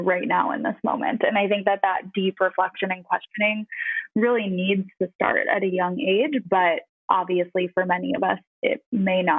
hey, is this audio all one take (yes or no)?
no